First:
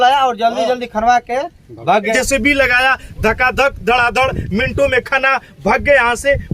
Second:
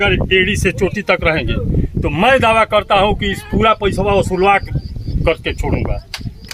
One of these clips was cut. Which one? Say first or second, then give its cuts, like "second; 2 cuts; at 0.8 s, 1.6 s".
first; 1 cut; at 2.1 s